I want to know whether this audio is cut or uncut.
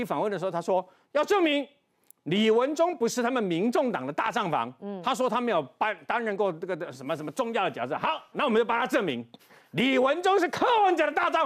uncut